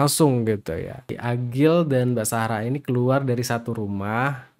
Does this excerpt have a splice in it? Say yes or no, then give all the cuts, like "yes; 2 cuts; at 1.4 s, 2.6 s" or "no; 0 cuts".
yes; 1 cut; at 1.1 s